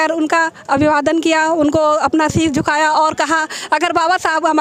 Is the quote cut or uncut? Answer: uncut